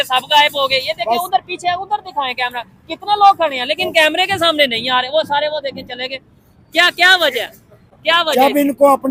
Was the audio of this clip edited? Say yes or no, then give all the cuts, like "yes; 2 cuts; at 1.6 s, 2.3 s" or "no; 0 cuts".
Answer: no; 0 cuts